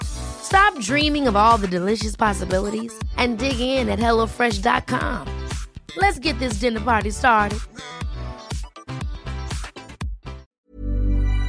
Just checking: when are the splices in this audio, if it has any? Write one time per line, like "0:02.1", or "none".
0:10.5